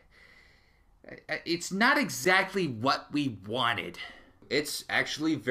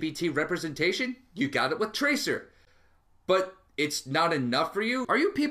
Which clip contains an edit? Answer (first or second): first